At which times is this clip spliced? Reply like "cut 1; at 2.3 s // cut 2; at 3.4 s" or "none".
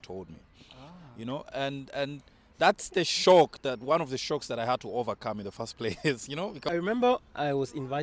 cut 1; at 6.6 s